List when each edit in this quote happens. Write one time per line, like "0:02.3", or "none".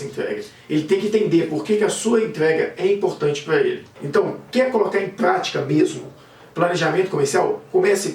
0:03.9